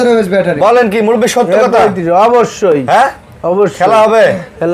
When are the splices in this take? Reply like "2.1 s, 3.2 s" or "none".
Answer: none